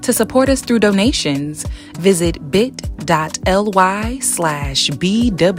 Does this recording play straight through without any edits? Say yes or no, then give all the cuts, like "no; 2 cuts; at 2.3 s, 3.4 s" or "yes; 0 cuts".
yes; 0 cuts